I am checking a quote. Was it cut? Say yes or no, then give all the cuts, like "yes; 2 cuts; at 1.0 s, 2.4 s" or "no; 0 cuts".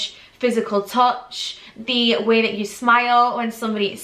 no; 0 cuts